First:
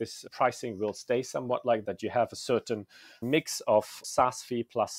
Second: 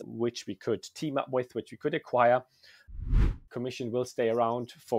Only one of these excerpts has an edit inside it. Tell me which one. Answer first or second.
second